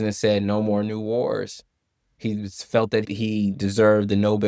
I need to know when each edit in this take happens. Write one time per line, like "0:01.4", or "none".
none

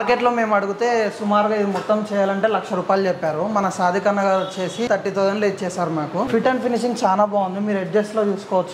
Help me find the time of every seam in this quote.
0:04.9
0:06.3

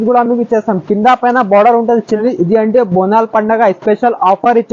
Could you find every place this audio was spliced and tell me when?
0:02.2

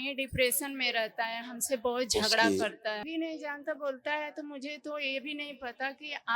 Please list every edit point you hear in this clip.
0:03.0

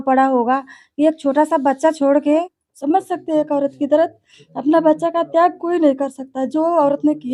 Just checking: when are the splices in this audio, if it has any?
0:02.6

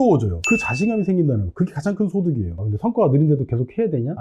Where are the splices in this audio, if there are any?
0:02.6

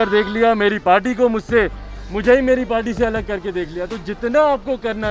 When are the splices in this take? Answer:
none

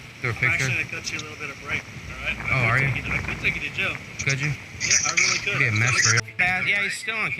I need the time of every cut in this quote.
0:06.2

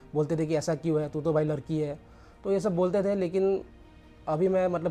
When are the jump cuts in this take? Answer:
none

